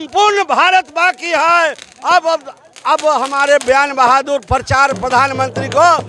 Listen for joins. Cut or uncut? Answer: uncut